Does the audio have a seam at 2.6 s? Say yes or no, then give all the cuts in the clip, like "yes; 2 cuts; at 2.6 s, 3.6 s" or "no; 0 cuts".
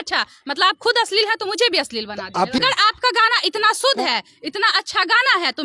yes; 1 cut; at 2.6 s